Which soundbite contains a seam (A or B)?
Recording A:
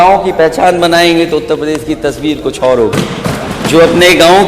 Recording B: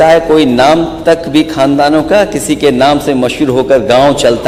A